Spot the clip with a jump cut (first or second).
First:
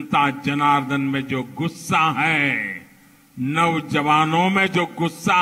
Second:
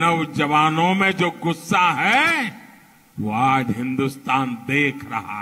second